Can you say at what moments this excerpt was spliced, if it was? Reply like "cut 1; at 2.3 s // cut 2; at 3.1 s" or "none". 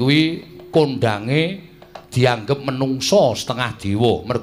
cut 1; at 3.5 s